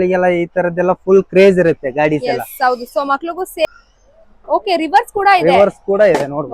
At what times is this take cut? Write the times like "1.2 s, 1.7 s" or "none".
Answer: 3.7 s